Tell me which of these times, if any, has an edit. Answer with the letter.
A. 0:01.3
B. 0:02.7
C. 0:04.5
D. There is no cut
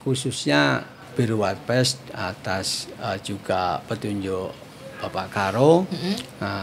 D